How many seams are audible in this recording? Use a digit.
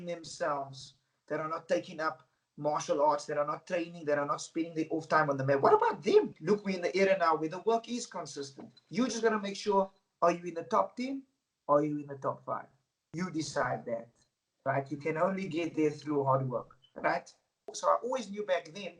2